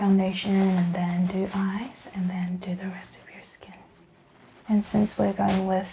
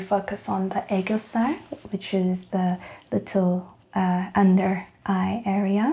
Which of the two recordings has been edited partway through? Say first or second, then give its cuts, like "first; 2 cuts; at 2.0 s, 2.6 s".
first; 1 cut; at 4.5 s